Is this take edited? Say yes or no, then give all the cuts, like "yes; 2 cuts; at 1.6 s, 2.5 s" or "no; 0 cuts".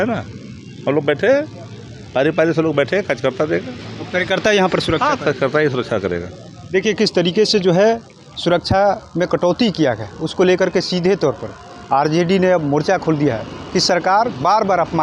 no; 0 cuts